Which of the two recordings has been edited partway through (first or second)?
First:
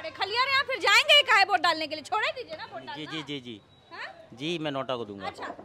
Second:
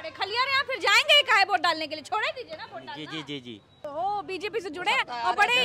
second